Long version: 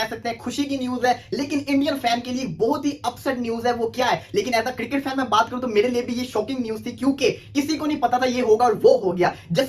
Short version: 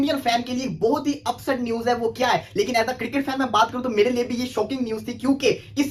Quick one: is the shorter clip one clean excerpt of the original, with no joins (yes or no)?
yes